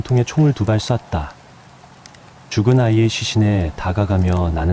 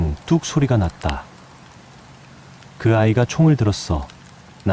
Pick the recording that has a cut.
second; 2 cuts; at 1.4 s, 2.8 s

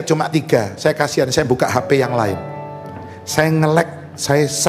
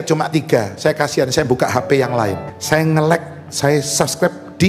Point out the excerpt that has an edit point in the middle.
second; 1 cut; at 2.5 s

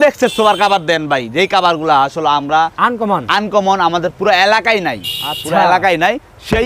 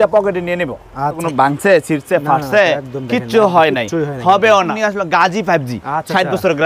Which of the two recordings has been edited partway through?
second; 2 cuts; at 1.2 s, 4.7 s

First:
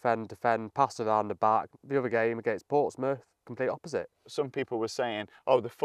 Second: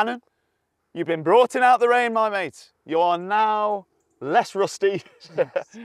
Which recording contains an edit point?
first; 2 cuts; at 1.7 s, 4.3 s

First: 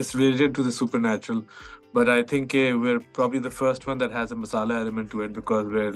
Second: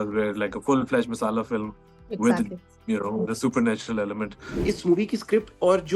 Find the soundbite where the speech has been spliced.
second; 1 cut; at 4.5 s

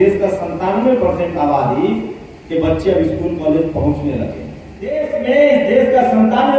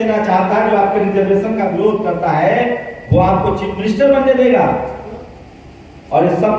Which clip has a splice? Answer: first; 1 cut; at 5.0 s

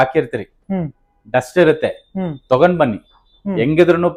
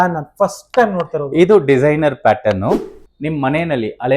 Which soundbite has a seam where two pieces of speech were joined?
second; 1 cut; at 2.9 s

